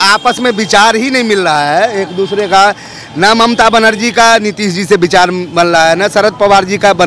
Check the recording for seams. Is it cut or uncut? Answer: uncut